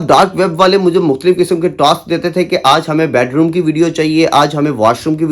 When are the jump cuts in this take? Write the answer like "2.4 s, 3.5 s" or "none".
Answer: none

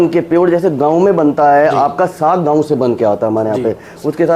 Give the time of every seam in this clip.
none

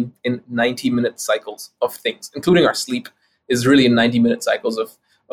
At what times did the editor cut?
none

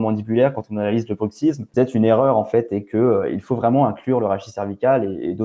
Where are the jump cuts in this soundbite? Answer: none

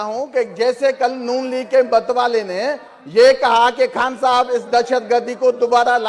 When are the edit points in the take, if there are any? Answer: none

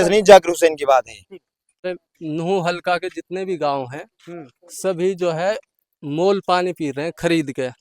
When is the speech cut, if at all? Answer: 1.9 s

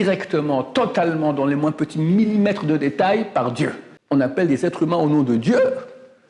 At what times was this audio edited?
3.9 s

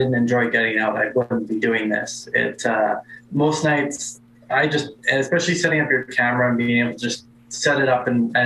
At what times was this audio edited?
none

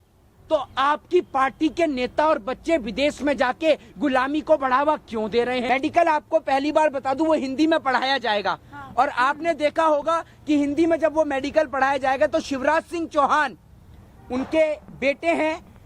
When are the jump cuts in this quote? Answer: 5.6 s

